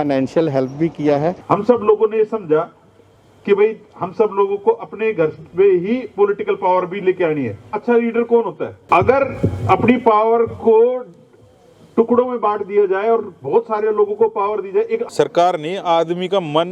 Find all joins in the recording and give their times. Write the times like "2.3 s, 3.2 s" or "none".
1.4 s, 7.7 s, 8.7 s, 15.1 s